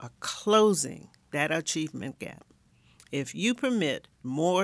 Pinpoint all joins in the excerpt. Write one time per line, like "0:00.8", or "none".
none